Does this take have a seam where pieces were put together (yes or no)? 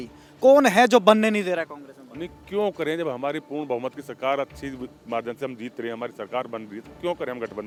no